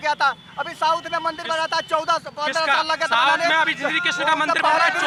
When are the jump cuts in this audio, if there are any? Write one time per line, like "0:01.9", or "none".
none